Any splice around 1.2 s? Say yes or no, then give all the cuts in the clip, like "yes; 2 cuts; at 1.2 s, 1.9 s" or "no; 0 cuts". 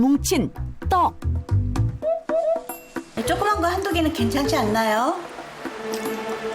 no; 1 cut; at 3.1 s